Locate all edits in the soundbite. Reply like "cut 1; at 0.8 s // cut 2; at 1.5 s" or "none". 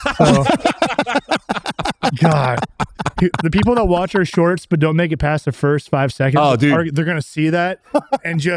none